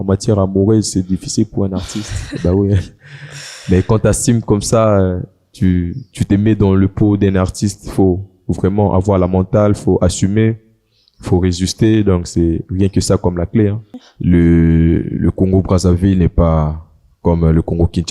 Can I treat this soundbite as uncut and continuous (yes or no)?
no